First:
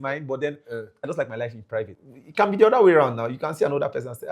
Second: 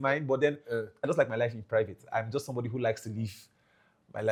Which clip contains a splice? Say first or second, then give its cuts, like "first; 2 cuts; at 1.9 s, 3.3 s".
first; 1 cut; at 2.0 s